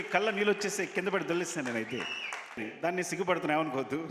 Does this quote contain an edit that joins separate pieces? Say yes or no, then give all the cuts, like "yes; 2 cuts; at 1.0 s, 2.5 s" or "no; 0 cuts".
yes; 1 cut; at 2.7 s